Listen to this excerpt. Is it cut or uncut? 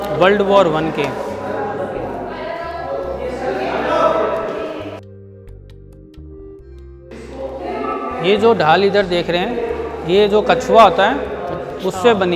uncut